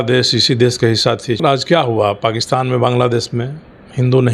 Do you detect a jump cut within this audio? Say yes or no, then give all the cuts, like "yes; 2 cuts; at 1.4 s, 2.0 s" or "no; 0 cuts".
yes; 1 cut; at 1.4 s